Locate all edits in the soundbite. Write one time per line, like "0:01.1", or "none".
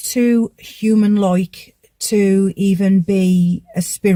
none

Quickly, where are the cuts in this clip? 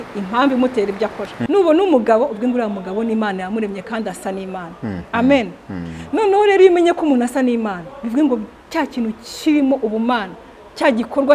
0:01.3

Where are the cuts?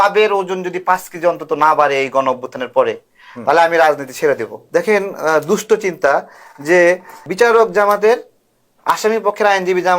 0:04.6
0:07.3

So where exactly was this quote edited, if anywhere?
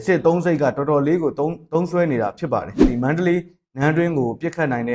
0:02.9

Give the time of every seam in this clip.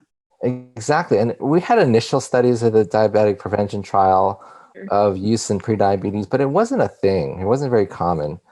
0:01.4
0:04.7

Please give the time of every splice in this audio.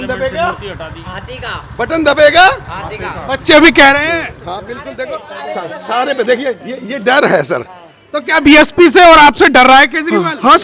0:04.8

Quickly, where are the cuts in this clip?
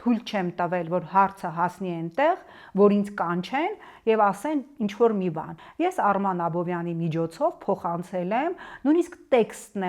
0:05.6

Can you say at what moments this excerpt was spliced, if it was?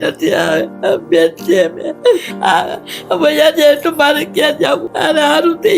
0:04.9

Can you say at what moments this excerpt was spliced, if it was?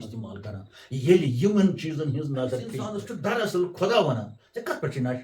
0:03.0

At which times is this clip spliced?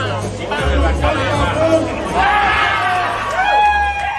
none

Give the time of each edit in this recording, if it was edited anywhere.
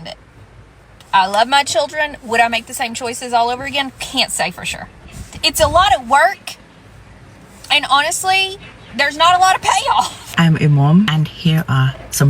0:10.2

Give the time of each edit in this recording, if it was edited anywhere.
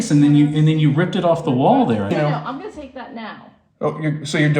0:02.1

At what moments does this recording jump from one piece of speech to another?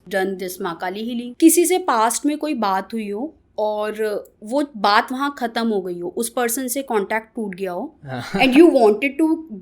0:01.3

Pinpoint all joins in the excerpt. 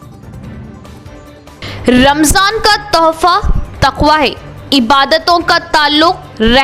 0:01.4

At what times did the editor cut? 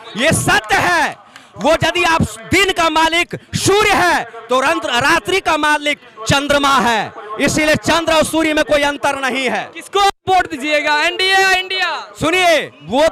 none

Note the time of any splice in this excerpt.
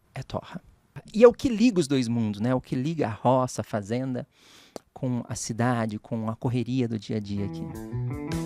0:01.0
0:07.5

